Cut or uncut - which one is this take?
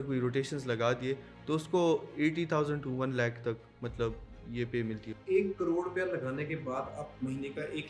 uncut